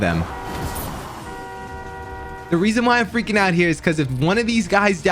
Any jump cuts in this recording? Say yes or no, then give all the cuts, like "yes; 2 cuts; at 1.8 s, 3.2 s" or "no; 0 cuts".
yes; 1 cut; at 2.5 s